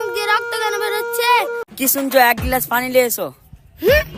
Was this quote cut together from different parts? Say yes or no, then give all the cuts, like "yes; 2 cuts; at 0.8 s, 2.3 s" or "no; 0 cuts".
yes; 1 cut; at 1.7 s